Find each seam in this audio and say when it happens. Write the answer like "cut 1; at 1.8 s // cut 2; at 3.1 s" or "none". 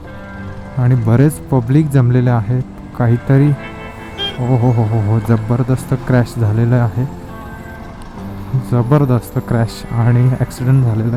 none